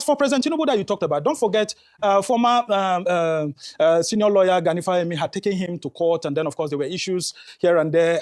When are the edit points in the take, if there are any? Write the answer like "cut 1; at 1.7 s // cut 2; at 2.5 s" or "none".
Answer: none